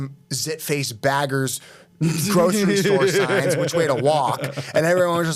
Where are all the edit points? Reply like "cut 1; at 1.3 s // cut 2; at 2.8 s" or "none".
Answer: none